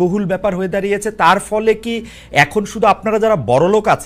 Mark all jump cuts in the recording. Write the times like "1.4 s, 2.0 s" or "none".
none